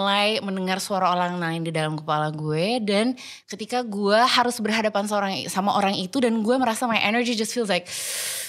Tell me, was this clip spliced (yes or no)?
no